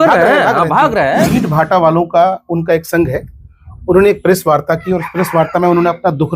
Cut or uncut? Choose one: cut